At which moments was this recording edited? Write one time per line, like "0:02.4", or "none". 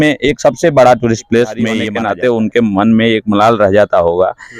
0:01.8

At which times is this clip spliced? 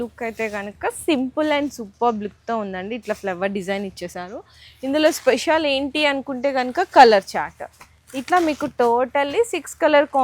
none

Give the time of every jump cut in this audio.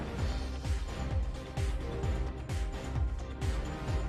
none

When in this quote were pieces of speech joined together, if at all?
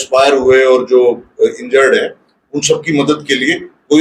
none

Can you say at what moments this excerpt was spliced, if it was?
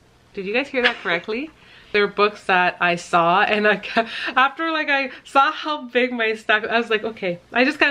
0:01.9

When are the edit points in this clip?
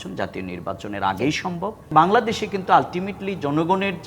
0:01.8

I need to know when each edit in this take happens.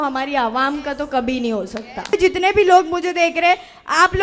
0:02.1

